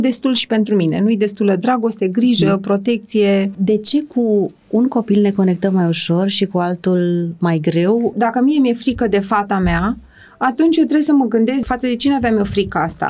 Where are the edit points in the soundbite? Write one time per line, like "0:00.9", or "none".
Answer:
0:03.6
0:08.1
0:11.6